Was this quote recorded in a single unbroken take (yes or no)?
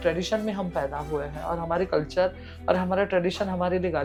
yes